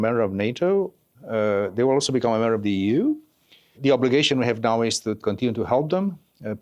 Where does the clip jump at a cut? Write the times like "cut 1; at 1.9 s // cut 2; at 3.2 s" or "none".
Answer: cut 1; at 1.1 s // cut 2; at 3.8 s // cut 3; at 5.2 s